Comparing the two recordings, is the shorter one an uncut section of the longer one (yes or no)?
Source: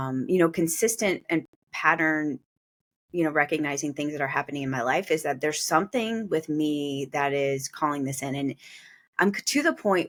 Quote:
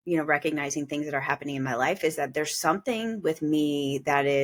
yes